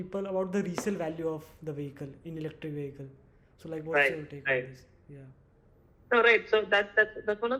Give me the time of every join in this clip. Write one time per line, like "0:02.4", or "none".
none